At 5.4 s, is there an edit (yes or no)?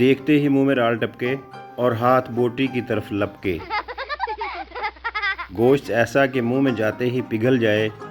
yes